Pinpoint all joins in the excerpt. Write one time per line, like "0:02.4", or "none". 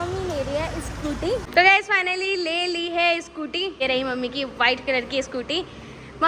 0:01.5
0:03.8